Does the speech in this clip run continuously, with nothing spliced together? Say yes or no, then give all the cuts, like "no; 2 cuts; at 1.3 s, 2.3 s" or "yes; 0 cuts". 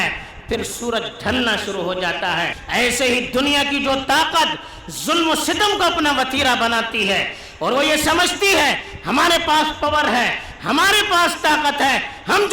no; 1 cut; at 2.6 s